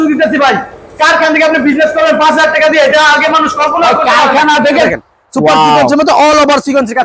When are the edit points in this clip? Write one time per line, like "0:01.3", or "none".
0:04.7